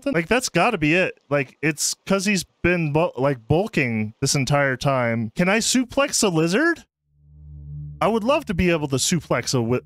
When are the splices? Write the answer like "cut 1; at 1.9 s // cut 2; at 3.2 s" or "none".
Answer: cut 1; at 5.3 s